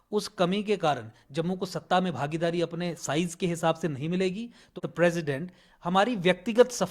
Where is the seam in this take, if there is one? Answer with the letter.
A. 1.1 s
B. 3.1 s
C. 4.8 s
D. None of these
C